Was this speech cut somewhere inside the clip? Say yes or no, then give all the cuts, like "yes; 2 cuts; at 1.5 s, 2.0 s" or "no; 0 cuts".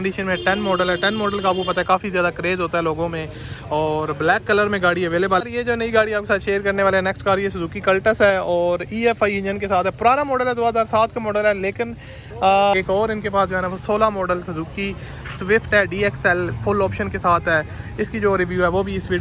yes; 2 cuts; at 5.4 s, 12.7 s